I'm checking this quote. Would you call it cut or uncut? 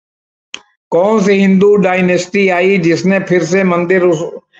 uncut